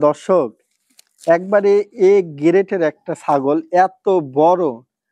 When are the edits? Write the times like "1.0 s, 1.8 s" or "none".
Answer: none

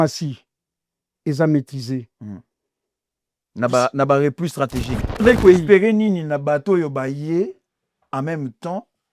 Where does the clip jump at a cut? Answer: 5.2 s

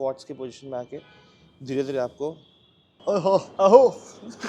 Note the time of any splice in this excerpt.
2.9 s

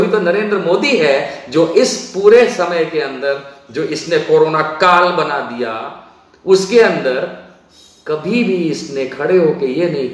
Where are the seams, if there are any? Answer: none

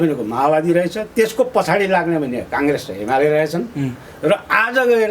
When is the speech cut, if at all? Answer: none

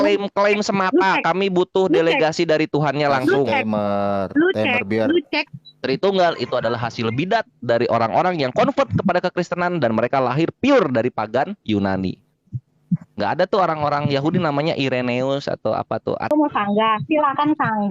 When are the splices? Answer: 5.4 s, 16.3 s

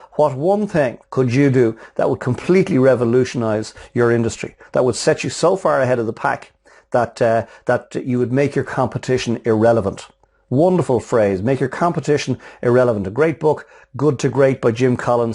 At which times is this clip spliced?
1.0 s

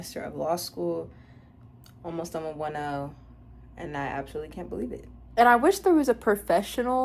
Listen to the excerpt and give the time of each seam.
5.3 s

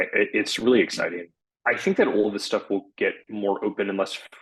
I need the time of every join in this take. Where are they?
1.3 s

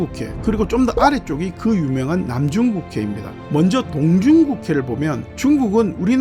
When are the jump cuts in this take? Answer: 3.4 s

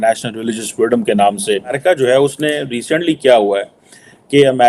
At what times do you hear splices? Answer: 1.8 s

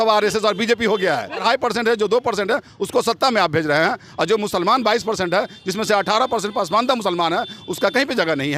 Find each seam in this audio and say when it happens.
1.4 s

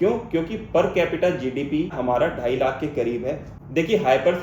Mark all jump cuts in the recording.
3.4 s

